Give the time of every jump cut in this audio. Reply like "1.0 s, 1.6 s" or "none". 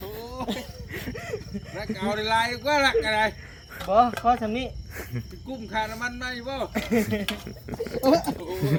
none